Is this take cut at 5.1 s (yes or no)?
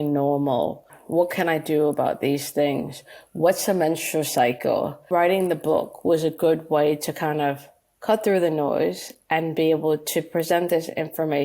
yes